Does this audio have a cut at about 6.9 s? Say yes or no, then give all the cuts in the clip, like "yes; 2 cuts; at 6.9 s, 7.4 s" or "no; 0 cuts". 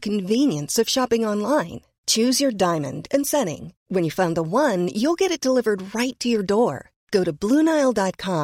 no; 0 cuts